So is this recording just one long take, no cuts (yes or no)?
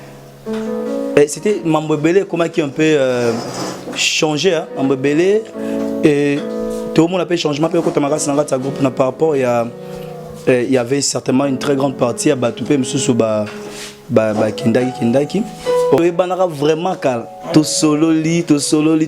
no